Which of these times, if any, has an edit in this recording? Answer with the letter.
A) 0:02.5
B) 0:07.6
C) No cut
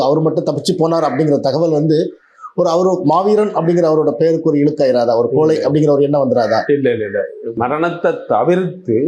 B